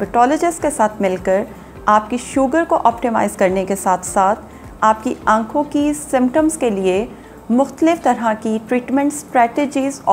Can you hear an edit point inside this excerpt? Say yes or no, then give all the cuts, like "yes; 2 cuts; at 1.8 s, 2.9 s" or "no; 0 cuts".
no; 0 cuts